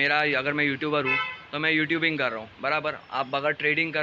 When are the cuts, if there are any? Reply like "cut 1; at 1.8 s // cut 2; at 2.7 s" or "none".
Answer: none